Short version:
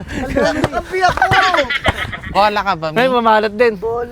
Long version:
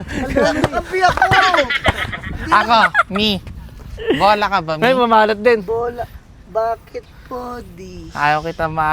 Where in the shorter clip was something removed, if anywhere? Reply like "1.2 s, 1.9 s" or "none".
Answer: 2.3 s